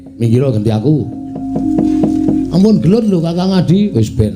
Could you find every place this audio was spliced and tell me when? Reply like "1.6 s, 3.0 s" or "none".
1.4 s

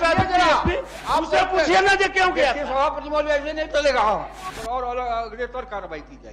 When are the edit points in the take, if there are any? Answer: 0.9 s, 4.4 s

